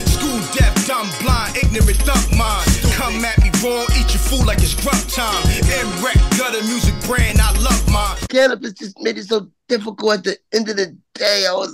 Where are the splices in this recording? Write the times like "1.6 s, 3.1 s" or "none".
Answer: 8.2 s